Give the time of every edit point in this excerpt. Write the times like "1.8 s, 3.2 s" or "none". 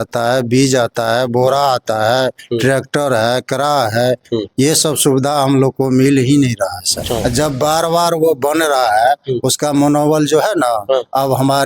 6.9 s